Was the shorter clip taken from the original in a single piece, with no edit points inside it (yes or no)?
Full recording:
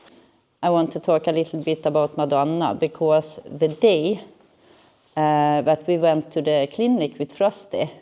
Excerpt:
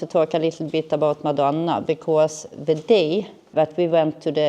no